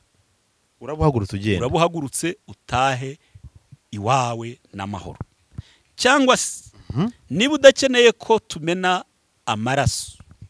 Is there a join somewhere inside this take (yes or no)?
no